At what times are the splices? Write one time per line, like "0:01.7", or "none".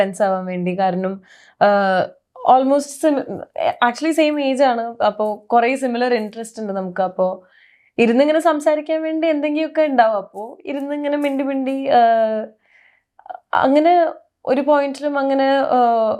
none